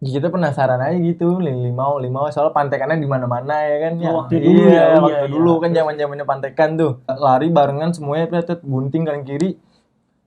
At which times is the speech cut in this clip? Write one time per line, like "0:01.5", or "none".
0:07.1